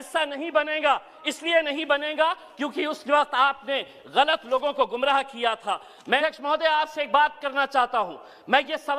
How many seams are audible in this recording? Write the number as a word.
one